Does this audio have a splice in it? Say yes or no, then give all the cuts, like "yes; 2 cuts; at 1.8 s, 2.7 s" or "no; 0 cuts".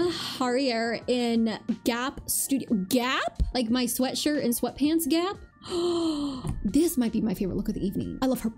no; 0 cuts